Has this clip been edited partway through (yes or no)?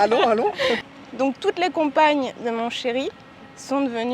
yes